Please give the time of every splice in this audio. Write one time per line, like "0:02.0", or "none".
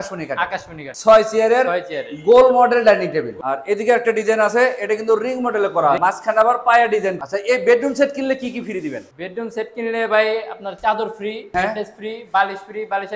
0:00.9
0:03.3
0:06.0
0:07.2
0:11.4